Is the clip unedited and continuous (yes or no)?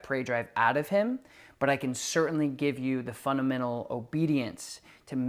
yes